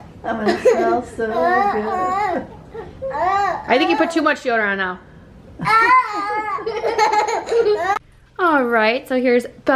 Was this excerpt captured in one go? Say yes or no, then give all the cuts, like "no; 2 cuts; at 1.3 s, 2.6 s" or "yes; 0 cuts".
no; 1 cut; at 8.0 s